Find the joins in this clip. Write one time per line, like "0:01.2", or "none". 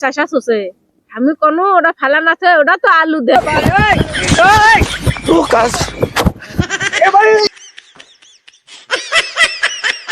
0:03.4